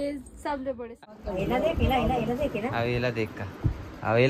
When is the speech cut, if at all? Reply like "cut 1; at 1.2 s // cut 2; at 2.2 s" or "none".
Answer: cut 1; at 1.0 s